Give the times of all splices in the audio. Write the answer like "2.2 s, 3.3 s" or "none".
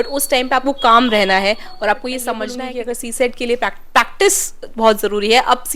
2.5 s